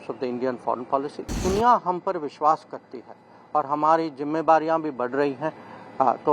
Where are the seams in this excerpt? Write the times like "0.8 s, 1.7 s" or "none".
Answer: 1.4 s